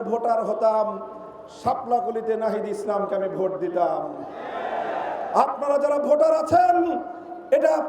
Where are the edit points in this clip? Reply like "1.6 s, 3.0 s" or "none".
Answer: none